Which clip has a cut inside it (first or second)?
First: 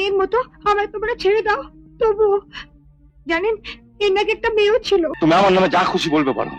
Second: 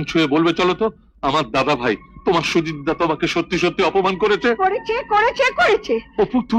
first